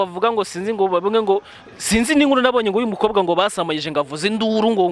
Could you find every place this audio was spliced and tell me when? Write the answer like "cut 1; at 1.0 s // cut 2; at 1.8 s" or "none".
none